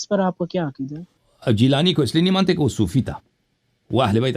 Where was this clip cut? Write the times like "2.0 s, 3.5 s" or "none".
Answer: 1.1 s

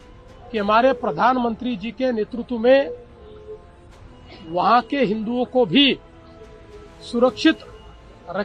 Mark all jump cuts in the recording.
none

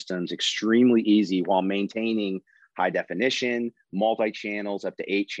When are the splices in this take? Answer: none

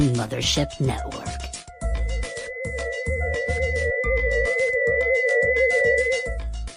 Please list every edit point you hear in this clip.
none

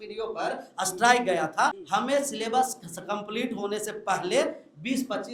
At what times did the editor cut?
1.7 s

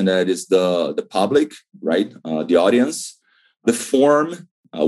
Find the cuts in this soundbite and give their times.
3.6 s

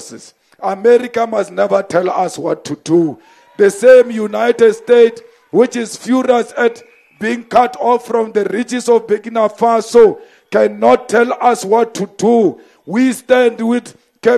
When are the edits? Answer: none

